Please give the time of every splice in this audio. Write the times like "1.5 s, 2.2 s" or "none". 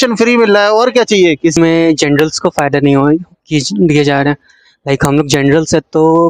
1.6 s

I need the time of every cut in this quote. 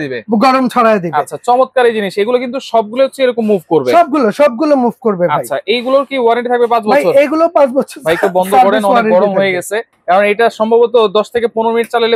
none

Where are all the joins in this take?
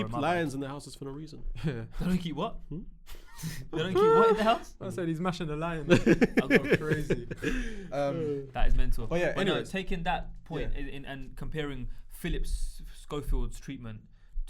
none

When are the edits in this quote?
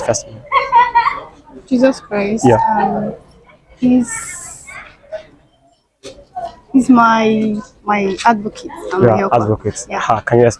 none

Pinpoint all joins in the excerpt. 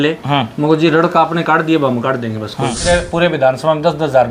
2.8 s

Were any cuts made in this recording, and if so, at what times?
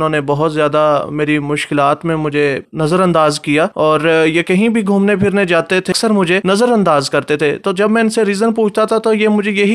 2.7 s, 3.7 s, 6.0 s

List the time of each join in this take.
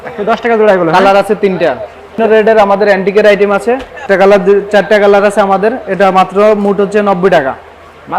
2.2 s, 4.0 s

